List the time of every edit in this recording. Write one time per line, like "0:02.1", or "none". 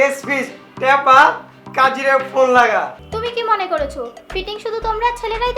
0:03.0